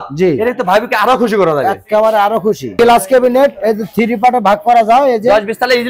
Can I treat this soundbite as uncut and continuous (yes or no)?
no